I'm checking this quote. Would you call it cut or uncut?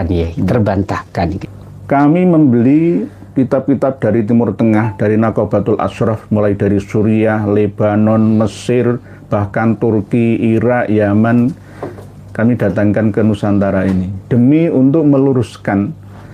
cut